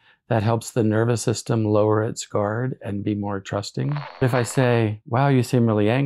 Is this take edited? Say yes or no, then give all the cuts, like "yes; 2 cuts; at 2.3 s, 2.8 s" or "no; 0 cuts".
yes; 1 cut; at 4.2 s